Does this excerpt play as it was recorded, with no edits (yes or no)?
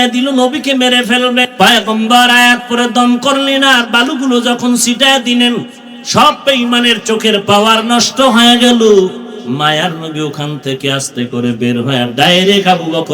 no